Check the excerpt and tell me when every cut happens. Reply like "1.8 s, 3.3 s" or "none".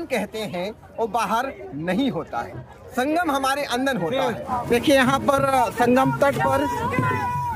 4.4 s